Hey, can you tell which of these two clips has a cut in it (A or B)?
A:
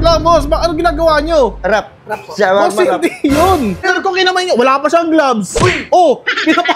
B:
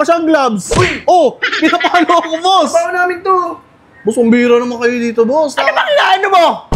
A